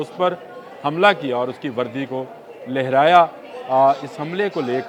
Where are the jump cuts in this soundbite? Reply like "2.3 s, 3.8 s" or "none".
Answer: none